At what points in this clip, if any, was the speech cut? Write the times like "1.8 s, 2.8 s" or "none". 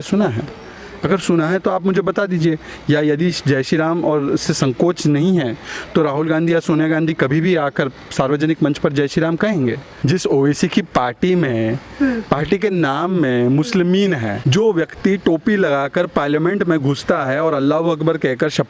9.9 s, 14.4 s